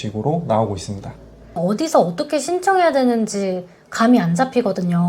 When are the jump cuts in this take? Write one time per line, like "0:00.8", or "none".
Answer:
0:01.6